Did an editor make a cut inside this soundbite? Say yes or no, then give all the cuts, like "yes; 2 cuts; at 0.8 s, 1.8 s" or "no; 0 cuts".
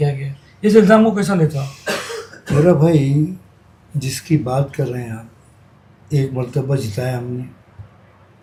no; 0 cuts